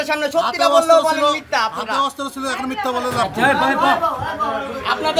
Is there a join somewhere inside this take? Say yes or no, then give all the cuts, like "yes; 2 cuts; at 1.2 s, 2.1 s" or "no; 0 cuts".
no; 0 cuts